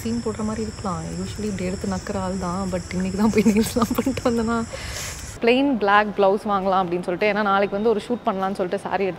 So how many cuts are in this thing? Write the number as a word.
one